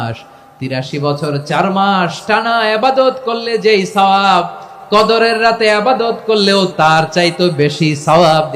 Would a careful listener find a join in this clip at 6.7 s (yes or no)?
yes